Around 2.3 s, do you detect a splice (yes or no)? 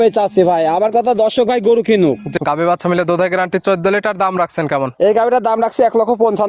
yes